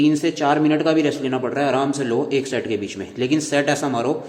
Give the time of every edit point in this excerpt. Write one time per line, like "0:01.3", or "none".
none